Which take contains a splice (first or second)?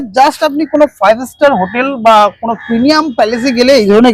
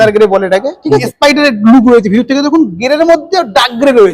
second